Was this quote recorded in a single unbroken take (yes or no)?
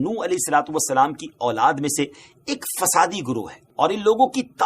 no